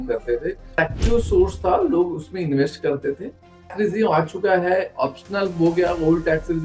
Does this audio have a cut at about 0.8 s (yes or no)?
yes